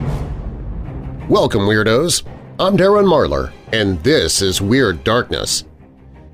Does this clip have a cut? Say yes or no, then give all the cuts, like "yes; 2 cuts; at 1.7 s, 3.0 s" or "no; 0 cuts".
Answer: yes; 1 cut; at 1.2 s